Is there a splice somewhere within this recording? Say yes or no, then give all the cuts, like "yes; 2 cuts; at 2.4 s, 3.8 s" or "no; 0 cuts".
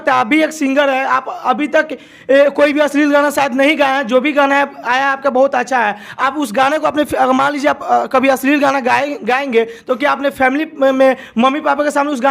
no; 0 cuts